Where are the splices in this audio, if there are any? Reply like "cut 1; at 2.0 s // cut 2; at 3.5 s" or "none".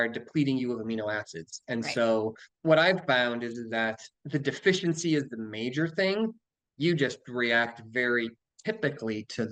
cut 1; at 2.5 s // cut 2; at 4.1 s

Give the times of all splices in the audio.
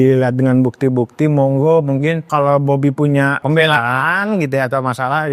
cut 1; at 2.2 s // cut 2; at 3.4 s

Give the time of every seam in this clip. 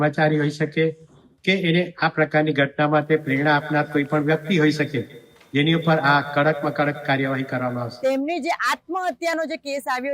cut 1; at 7.9 s

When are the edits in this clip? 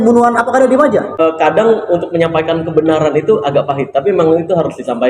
cut 1; at 1.2 s

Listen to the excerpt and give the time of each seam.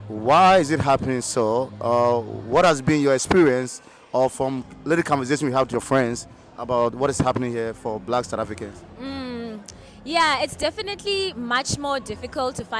none

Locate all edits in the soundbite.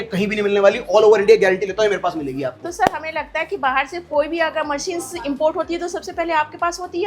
none

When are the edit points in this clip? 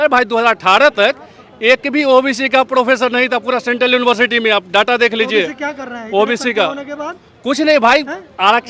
none

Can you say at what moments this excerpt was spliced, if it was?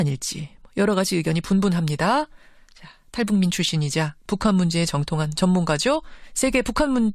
none

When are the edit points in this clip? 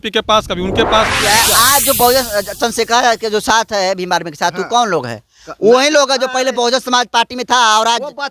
cut 1; at 1.2 s

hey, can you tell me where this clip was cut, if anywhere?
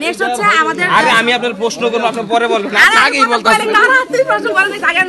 none

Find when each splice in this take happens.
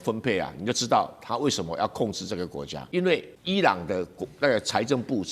cut 1; at 2.8 s // cut 2; at 3.3 s

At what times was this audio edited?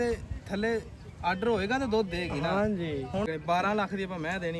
cut 1; at 3.3 s

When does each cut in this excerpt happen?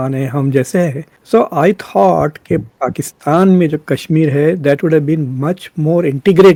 none

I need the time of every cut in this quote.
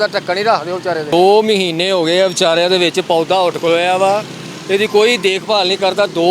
cut 1; at 1.1 s

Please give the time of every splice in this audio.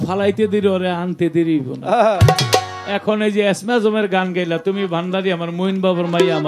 none

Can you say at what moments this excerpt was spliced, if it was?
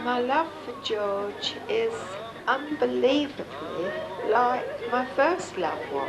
cut 1; at 2.3 s

